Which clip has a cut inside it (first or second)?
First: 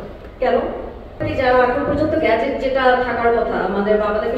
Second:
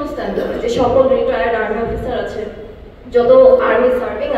first